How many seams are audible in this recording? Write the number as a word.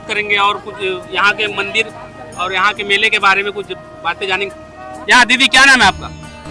zero